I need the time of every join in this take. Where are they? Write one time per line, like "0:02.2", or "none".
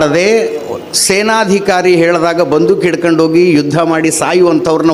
none